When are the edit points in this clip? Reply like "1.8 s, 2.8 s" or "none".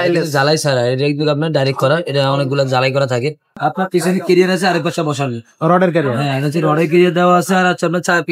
3.6 s